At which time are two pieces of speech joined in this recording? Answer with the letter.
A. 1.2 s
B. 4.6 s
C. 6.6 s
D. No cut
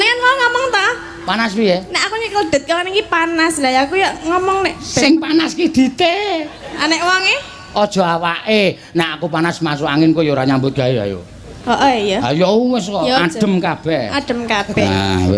D